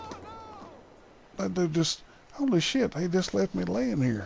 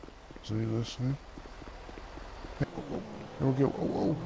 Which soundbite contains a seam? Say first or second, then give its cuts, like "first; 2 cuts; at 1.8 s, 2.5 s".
second; 1 cut; at 2.6 s